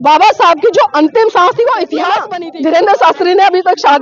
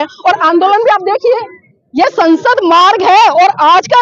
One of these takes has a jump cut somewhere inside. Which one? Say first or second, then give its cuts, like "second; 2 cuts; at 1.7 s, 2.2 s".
first; 1 cut; at 2.3 s